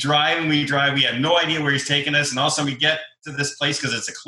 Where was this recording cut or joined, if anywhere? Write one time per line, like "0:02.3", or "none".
none